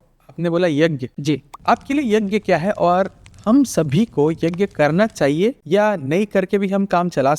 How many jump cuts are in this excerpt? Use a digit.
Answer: 2